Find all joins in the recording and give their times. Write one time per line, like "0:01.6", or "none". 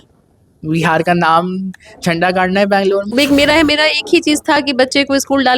0:03.1